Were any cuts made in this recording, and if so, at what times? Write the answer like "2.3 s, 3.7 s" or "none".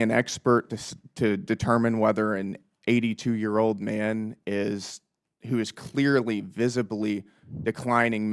none